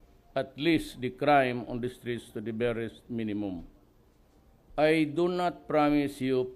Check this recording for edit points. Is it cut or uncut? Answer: uncut